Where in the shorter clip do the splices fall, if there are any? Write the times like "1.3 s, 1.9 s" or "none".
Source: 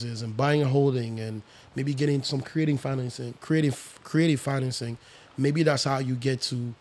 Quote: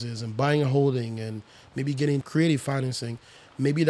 2.3 s